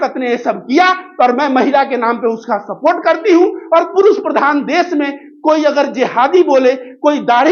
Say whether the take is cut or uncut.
uncut